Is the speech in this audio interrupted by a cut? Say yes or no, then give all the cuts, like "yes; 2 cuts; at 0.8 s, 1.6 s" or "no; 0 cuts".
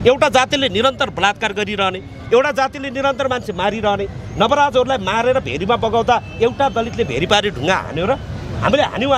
no; 0 cuts